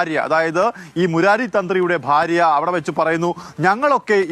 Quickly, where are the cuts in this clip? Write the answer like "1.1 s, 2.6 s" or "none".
none